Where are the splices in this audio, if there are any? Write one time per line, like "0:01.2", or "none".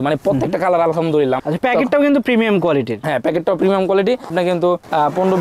0:01.4